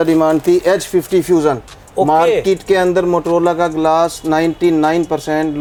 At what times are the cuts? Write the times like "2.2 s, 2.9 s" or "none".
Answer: none